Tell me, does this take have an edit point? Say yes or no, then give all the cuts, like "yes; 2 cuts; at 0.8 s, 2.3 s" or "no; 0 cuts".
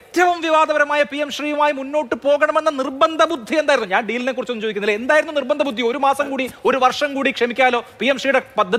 no; 0 cuts